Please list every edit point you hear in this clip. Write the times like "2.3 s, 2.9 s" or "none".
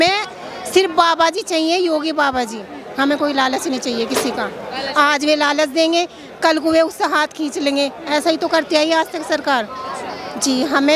none